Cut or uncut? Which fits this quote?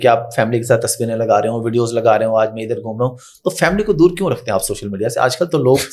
uncut